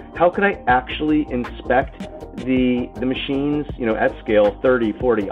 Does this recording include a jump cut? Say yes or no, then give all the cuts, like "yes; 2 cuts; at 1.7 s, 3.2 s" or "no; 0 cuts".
no; 0 cuts